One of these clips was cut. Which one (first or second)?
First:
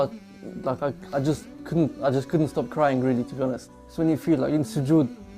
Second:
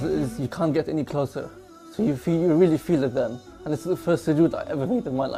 first